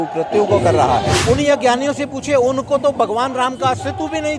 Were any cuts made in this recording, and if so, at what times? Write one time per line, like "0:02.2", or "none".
0:01.2